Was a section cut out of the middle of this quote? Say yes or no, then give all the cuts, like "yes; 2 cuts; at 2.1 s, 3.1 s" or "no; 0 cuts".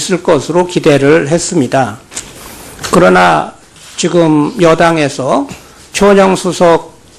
yes; 1 cut; at 3.9 s